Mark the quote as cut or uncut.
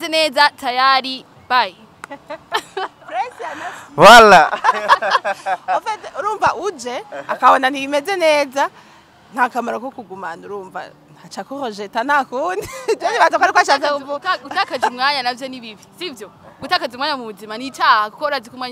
uncut